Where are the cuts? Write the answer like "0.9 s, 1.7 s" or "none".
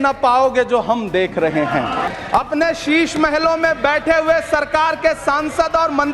2.1 s

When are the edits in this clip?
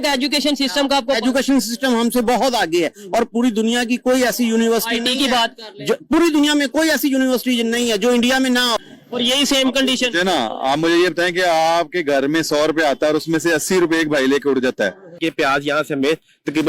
8.7 s, 15.2 s

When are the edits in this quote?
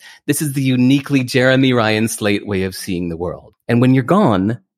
3.5 s

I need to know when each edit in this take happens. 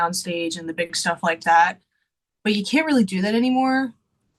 none

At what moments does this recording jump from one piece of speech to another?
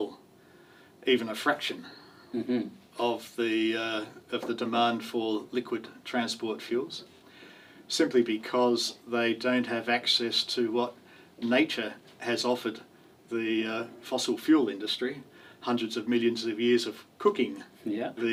none

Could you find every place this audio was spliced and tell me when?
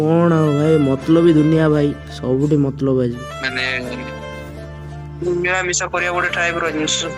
3.2 s

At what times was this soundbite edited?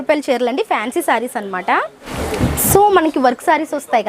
2.0 s

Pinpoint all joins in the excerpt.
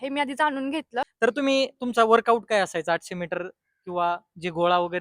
1.1 s

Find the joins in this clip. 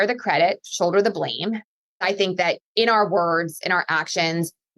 2.0 s

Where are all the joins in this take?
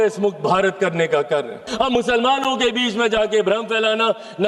1.6 s

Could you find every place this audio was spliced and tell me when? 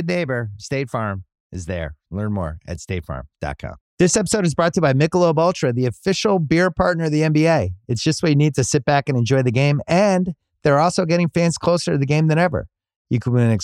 3.8 s

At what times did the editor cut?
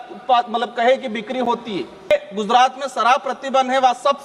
2.1 s

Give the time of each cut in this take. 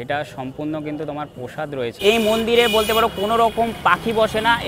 1.9 s

